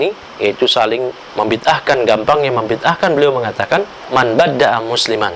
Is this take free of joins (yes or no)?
no